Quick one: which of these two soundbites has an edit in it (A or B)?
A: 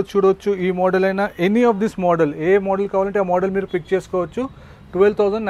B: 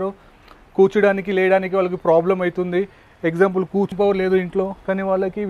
B